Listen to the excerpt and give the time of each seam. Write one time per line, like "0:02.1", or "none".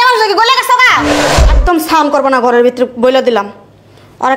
0:01.2